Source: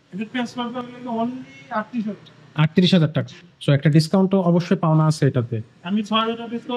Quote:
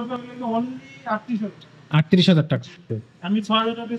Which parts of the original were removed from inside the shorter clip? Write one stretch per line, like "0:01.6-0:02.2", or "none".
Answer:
0:03.5-0:05.5